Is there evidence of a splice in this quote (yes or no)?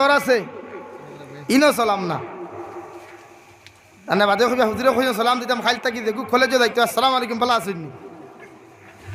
no